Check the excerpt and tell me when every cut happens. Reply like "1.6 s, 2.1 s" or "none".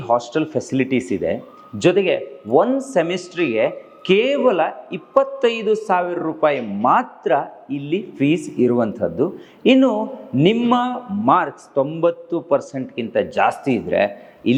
none